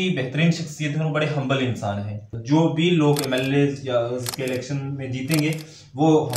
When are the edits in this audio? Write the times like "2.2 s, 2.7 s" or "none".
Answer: 2.3 s